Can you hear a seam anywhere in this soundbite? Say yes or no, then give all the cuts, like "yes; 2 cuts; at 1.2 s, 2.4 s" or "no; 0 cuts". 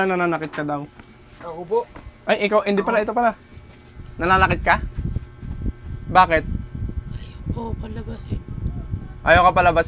no; 0 cuts